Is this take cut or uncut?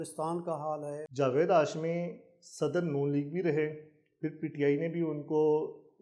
cut